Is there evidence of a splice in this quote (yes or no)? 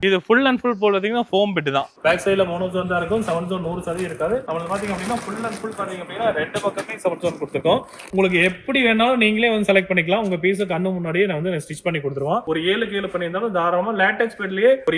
yes